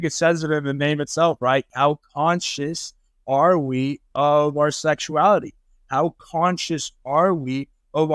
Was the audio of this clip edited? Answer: yes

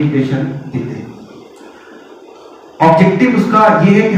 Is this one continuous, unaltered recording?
yes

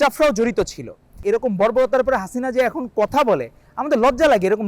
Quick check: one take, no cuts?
no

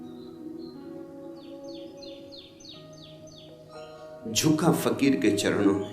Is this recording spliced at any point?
no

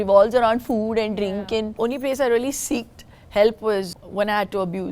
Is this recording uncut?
no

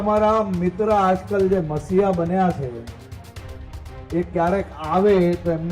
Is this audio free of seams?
yes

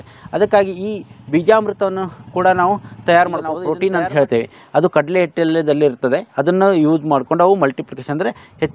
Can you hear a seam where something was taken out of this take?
yes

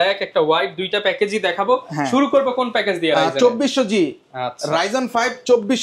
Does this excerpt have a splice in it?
no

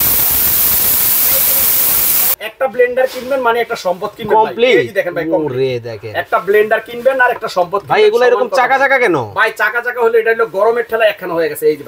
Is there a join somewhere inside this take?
yes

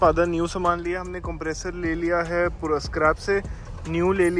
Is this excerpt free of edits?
yes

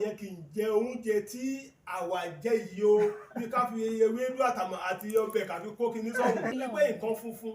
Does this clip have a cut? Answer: yes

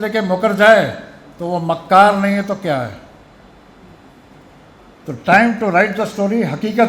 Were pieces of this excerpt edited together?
no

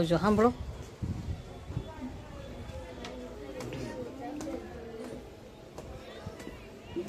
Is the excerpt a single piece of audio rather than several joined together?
yes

